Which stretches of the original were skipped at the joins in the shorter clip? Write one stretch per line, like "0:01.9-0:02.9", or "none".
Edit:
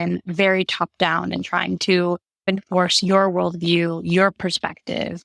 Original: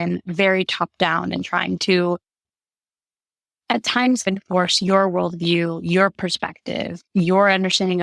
0:02.4-0:04.2